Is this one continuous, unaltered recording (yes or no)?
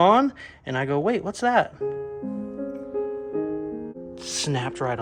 no